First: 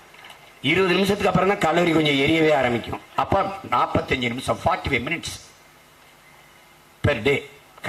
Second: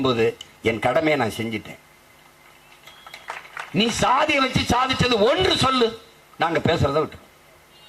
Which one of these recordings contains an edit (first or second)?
second